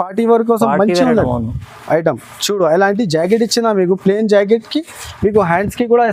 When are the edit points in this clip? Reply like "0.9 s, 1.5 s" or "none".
none